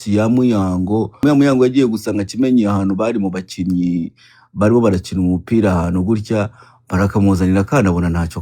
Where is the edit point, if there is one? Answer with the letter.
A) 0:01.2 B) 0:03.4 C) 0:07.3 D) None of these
A